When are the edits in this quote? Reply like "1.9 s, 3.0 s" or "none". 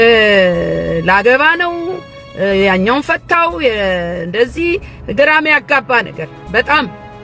none